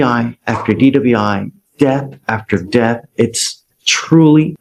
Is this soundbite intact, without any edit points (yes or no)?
yes